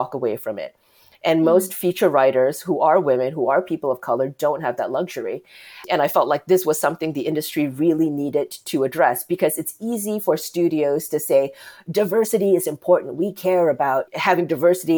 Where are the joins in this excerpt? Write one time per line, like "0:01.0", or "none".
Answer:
0:14.1